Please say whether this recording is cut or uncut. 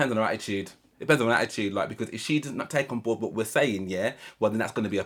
uncut